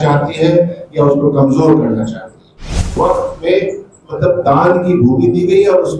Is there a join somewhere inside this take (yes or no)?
yes